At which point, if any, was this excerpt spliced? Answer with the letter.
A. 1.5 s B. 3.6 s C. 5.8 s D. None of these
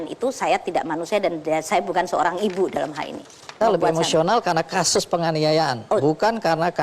B